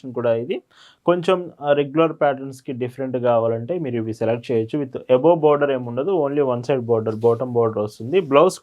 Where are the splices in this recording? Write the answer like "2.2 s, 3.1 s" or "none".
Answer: none